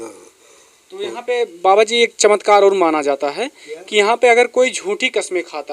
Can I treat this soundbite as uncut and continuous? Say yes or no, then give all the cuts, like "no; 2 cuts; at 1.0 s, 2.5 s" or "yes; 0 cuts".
yes; 0 cuts